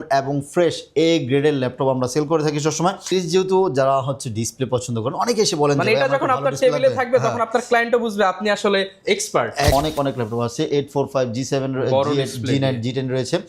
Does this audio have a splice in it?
yes; 2 cuts; at 3.1 s, 9.7 s

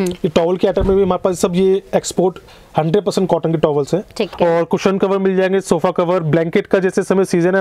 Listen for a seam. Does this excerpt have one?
yes; 1 cut; at 4.3 s

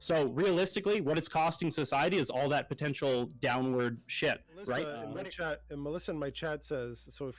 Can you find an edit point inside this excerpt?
yes; 1 cut; at 5.0 s

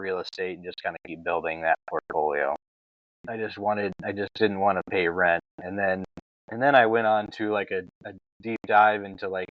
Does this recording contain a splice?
yes; 1 cut; at 2.9 s

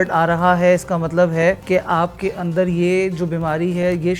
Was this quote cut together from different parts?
yes; 1 cut; at 1.6 s

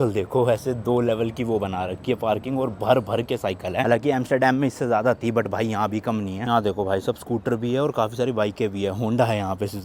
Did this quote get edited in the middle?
no; 0 cuts

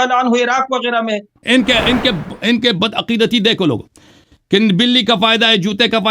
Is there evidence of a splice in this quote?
yes; 1 cut; at 1.3 s

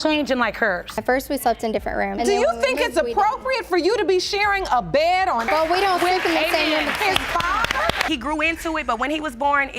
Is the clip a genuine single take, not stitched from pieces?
no; 1 cut; at 8.1 s

